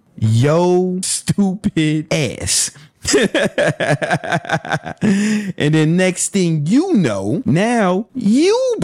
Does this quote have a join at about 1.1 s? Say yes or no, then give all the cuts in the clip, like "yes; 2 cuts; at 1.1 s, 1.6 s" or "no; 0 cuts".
yes; 3 cuts; at 1.1 s, 2.0 s, 7.4 s